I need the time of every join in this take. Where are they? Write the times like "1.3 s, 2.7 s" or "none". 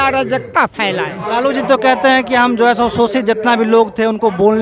1.2 s